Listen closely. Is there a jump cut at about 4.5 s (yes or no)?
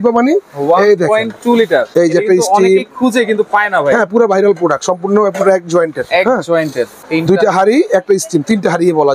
no